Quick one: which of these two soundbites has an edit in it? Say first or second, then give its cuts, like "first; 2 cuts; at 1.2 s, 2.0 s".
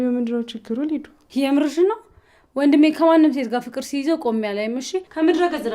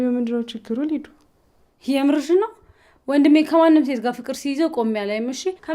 first; 1 cut; at 1.2 s